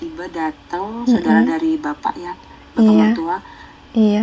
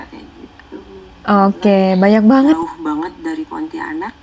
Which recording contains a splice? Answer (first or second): second